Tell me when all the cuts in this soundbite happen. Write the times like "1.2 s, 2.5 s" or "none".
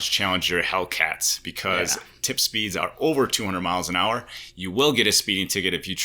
none